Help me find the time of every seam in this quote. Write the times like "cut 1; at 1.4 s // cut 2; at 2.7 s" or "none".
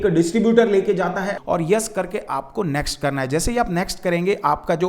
cut 1; at 1.4 s